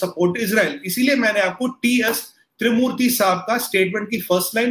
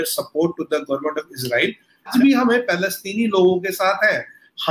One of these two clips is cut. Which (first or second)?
second